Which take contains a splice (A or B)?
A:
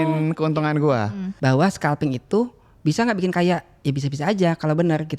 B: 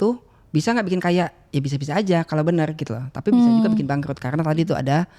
A